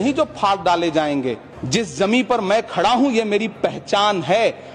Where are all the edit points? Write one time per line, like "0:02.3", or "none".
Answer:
0:01.5